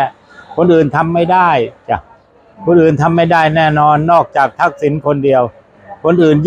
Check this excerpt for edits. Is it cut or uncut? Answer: uncut